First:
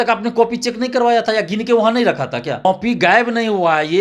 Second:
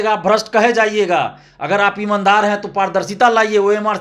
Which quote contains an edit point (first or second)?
first